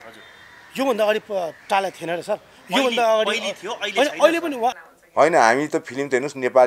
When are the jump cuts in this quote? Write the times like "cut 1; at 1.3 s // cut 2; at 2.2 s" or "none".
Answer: cut 1; at 4.8 s